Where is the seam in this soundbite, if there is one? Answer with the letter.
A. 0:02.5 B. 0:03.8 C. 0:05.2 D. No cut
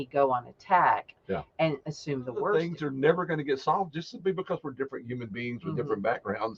A